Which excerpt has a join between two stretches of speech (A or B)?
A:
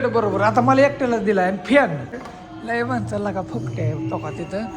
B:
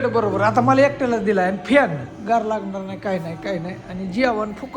A